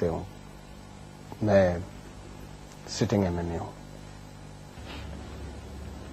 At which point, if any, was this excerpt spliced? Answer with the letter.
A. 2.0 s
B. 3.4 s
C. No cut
C